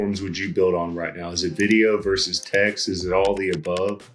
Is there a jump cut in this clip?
no; 0 cuts

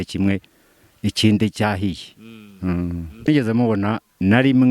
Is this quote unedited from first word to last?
no; 1 cut; at 3.3 s

